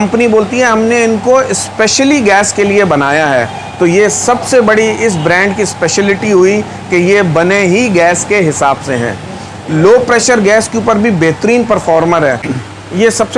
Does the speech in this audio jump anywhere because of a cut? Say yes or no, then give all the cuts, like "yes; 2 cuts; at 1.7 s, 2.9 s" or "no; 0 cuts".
yes; 1 cut; at 12.5 s